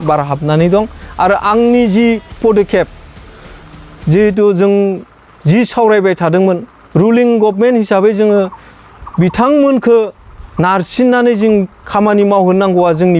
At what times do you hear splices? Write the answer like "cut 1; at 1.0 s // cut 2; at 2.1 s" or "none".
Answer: none

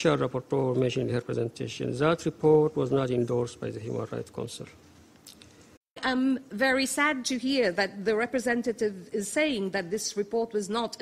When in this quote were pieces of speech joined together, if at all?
cut 1; at 6.0 s

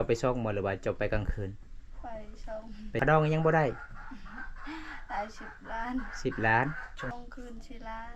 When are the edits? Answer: cut 1; at 3.0 s // cut 2; at 7.1 s

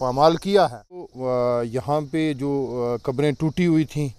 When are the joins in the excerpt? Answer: cut 1; at 1.1 s

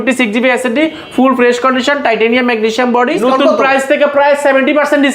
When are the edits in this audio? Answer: cut 1; at 3.2 s

